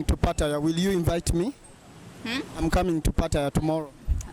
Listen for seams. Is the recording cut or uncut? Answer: uncut